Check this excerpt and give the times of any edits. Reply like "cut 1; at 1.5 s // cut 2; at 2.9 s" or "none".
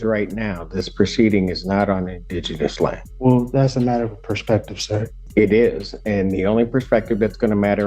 cut 1; at 3.1 s // cut 2; at 5.2 s